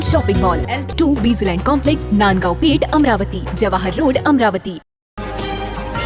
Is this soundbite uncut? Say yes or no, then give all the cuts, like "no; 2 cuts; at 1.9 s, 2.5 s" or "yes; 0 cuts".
no; 1 cut; at 5.0 s